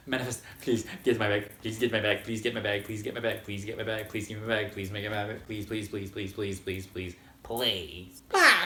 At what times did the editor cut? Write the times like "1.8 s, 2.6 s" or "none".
none